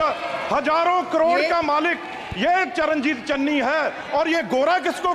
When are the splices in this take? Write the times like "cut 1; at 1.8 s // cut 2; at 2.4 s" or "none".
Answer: none